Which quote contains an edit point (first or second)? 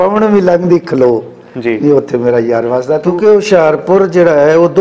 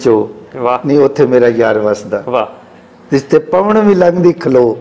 first